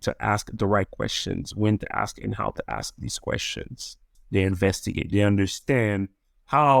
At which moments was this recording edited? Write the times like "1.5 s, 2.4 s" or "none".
4.1 s